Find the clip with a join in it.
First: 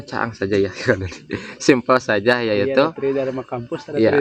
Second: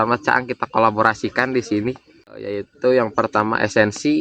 second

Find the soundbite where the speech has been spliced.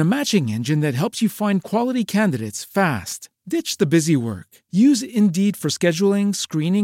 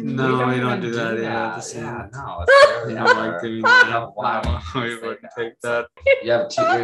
second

